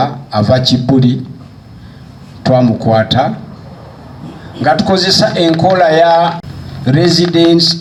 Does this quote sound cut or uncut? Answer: uncut